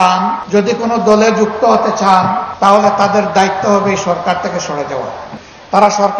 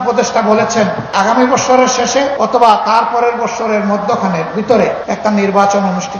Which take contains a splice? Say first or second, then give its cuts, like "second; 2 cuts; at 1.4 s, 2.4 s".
second; 3 cuts; at 1.1 s, 2.3 s, 5.1 s